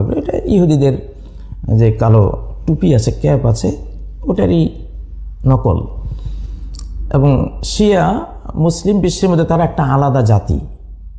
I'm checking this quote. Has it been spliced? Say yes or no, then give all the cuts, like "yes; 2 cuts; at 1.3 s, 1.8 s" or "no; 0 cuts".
no; 0 cuts